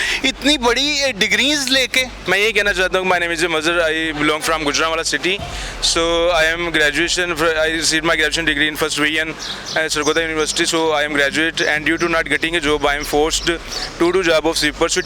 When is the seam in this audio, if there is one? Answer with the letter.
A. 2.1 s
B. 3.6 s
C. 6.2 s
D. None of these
A